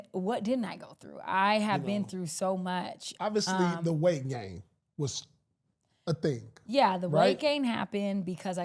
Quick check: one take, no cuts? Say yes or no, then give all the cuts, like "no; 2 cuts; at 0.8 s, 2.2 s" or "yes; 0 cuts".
no; 1 cut; at 3.0 s